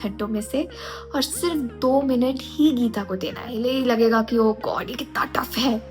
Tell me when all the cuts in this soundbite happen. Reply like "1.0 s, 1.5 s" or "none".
3.6 s